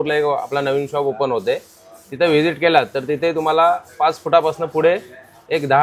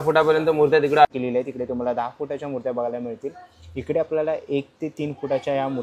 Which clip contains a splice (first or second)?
second